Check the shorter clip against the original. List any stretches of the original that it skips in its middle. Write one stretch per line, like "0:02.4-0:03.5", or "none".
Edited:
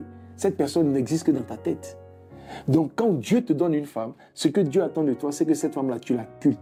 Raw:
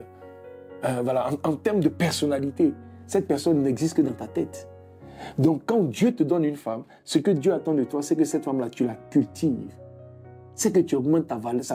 none